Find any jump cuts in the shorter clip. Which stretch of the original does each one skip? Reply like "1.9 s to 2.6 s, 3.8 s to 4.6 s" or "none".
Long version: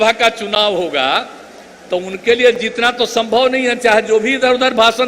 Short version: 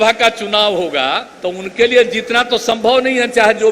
1.3 s to 1.8 s

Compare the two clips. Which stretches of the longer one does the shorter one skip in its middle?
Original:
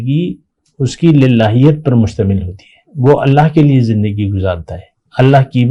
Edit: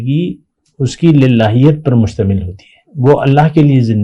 none

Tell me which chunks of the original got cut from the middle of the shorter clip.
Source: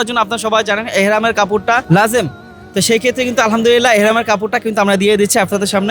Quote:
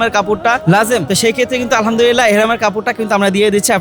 2.3 s to 2.7 s

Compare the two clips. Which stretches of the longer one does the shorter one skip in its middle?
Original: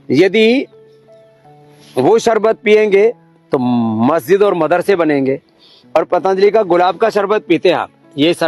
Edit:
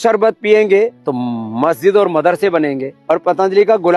3.3 s to 3.5 s, 5.3 s to 5.7 s

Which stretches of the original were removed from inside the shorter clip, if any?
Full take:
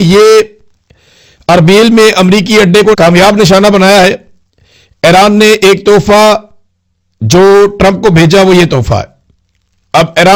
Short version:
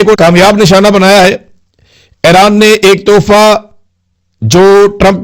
none

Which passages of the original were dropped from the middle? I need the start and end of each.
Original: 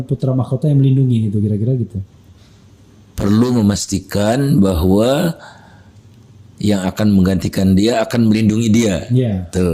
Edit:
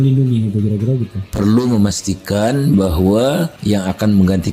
2.0 s to 3.0 s, 5.4 s to 6.5 s

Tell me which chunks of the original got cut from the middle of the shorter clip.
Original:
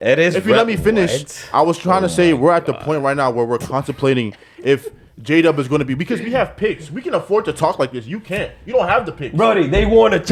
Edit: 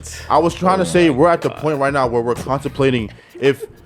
none

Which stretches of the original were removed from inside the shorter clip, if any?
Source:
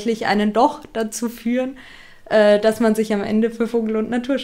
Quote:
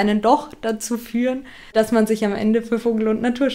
2.0 s to 2.6 s

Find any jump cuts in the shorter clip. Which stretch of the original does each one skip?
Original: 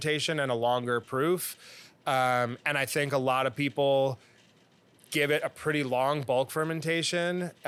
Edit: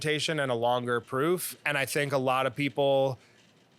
1.6 s to 2.6 s

